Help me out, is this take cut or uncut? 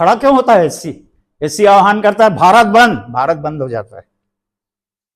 uncut